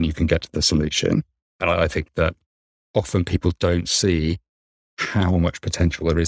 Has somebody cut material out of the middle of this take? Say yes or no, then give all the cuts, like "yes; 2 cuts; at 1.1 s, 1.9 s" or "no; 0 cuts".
yes; 1 cut; at 2.8 s